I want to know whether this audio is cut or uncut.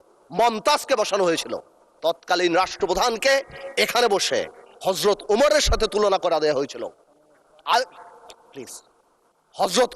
uncut